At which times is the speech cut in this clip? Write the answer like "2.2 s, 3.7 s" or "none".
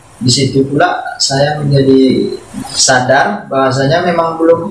2.4 s